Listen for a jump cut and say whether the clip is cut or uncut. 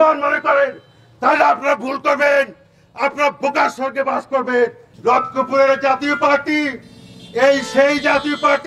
cut